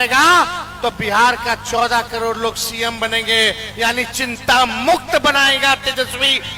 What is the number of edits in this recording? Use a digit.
0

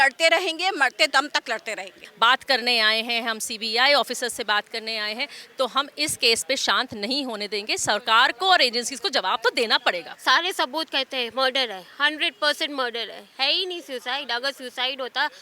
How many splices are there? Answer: 2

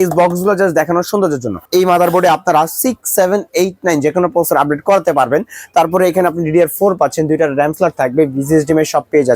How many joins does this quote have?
1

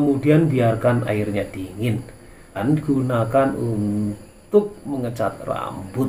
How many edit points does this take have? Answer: 1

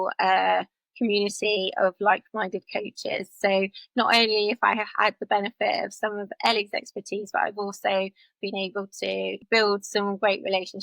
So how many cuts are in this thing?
1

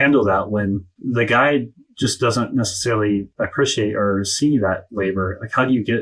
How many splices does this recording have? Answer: 1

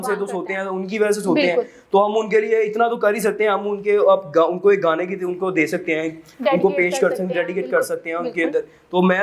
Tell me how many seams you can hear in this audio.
0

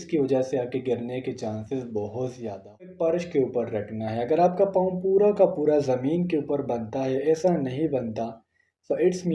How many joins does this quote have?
1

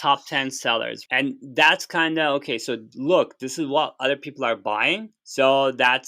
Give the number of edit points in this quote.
2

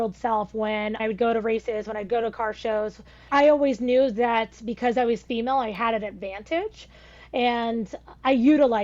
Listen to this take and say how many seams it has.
2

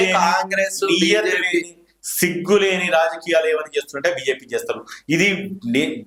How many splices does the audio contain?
0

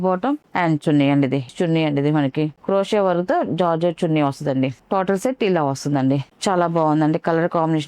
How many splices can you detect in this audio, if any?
2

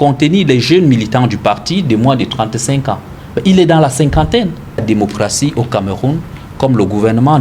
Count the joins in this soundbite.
1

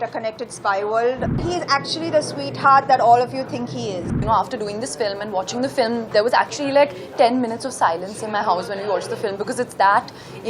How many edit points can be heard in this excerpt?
2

